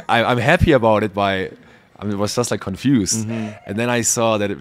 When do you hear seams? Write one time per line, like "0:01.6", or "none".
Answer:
none